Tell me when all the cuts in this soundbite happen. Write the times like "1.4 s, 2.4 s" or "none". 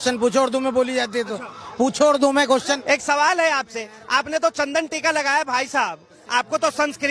2.8 s